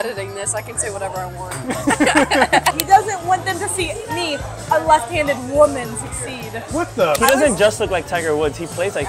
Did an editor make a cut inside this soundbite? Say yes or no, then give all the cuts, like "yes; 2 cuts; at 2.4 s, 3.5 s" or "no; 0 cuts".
yes; 2 cuts; at 2.7 s, 7.2 s